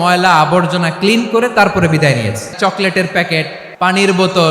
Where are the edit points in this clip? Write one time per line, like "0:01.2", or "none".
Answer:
0:02.6
0:03.6